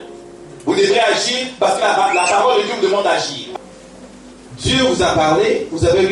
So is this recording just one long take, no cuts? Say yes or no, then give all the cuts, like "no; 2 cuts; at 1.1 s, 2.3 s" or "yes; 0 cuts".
no; 1 cut; at 3.4 s